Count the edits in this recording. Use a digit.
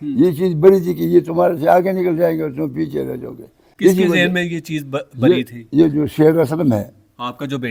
0